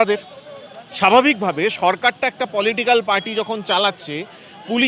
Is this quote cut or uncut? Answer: uncut